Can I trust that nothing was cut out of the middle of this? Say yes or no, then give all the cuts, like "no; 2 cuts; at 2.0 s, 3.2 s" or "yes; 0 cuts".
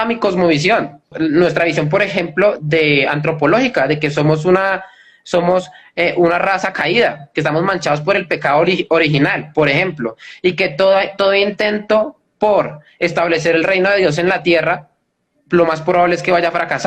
no; 1 cut; at 1.1 s